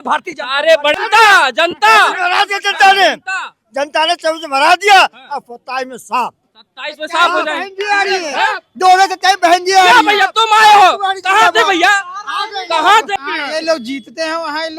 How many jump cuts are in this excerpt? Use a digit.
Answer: 2